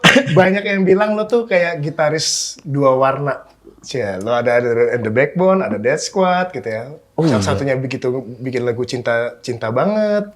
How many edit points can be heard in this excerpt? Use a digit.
0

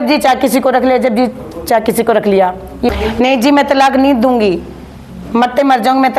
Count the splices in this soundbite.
1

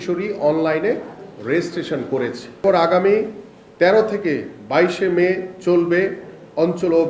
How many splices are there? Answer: 1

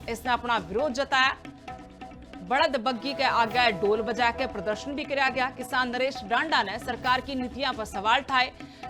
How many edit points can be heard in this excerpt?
0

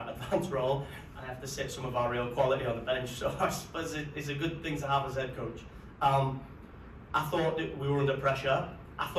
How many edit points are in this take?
0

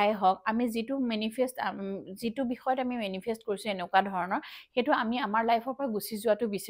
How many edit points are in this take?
0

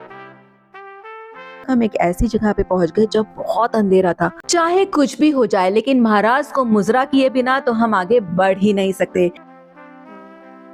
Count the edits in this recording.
3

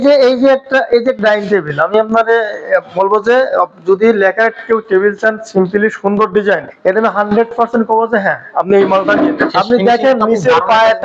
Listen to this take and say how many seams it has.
2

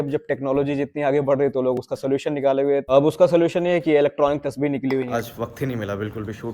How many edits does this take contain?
1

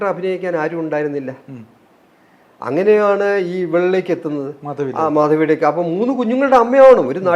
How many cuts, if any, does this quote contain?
0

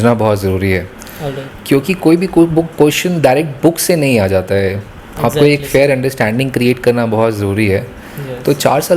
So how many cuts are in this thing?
0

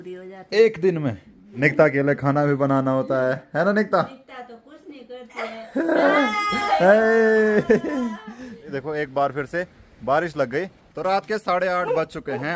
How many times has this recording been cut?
3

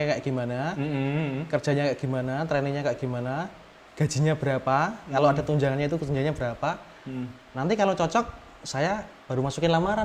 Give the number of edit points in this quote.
0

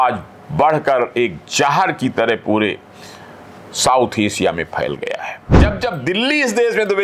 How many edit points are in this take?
1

